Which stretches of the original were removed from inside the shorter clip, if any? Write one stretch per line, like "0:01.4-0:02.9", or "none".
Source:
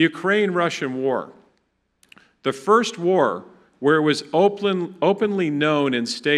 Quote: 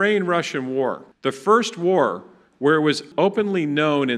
0:01.3-0:02.3
0:04.2-0:04.9